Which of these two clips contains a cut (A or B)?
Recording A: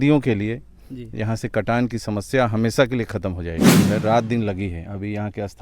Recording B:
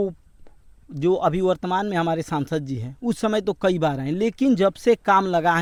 A